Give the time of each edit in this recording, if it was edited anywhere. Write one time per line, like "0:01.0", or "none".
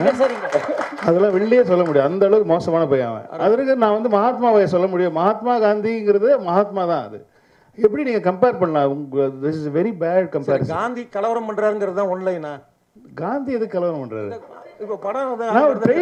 none